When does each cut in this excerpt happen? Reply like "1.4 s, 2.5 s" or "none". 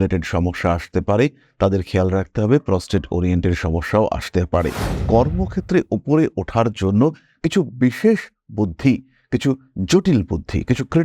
5.0 s

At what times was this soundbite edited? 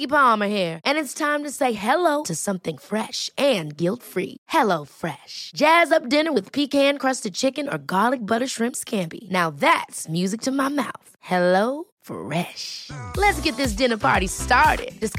none

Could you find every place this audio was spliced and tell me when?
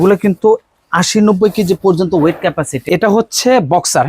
2.8 s

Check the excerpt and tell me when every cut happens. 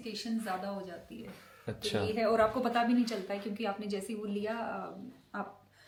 none

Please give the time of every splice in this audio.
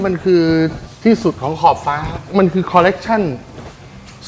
2.2 s

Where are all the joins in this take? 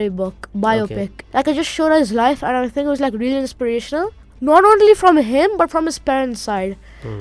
1.2 s, 4.3 s

